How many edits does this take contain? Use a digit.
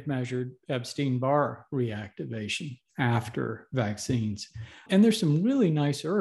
1